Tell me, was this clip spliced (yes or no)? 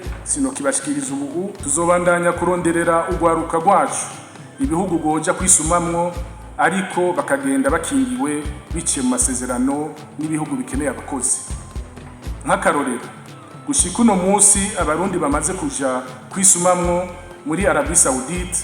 yes